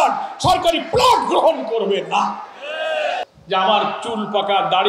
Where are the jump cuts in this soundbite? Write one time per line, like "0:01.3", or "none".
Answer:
0:03.2